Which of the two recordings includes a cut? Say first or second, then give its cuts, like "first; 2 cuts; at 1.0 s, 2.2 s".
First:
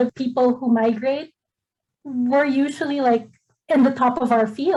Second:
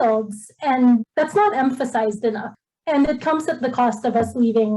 second; 2 cuts; at 1.1 s, 2.5 s